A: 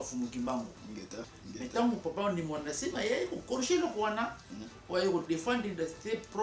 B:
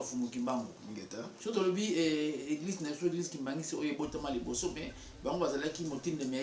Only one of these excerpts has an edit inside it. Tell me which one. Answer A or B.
A